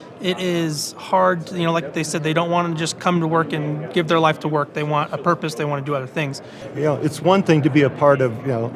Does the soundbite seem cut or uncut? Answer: cut